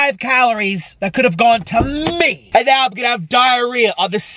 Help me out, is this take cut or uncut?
cut